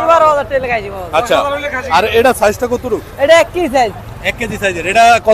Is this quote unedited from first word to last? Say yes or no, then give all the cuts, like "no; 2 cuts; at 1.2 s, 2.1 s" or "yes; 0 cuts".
yes; 0 cuts